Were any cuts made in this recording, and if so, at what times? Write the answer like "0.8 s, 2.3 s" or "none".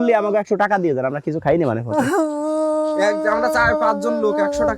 none